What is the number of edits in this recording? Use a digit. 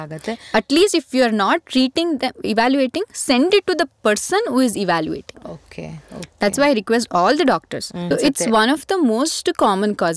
1